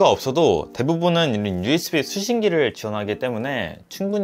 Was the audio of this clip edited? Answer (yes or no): no